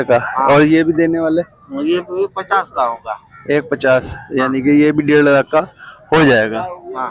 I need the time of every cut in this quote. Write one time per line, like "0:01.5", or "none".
none